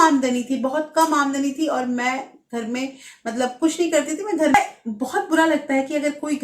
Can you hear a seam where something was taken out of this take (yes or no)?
yes